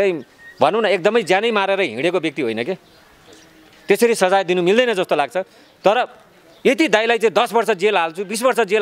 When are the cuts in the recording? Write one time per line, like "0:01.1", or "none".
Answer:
none